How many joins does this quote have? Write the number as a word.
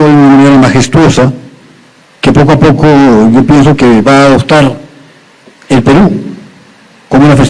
zero